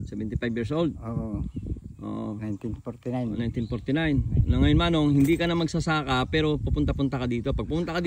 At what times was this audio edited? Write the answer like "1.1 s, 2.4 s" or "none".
none